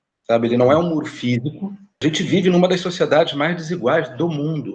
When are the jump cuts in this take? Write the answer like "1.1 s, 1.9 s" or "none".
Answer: 2.0 s